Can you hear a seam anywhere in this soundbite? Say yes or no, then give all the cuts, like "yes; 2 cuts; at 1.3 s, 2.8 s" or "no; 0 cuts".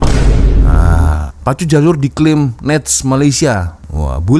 yes; 1 cut; at 1.3 s